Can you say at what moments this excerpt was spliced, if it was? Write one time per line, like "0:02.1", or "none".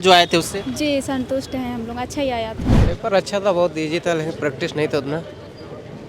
0:02.8